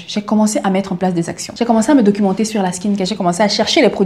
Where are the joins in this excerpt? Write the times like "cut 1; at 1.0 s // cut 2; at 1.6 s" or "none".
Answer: cut 1; at 1.4 s